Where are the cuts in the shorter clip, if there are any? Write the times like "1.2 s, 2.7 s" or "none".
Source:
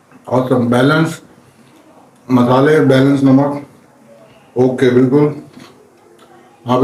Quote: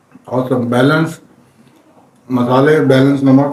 none